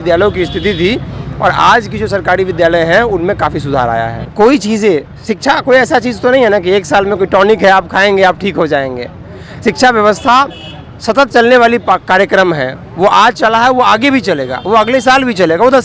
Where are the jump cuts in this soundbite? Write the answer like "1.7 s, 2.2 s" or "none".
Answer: 4.2 s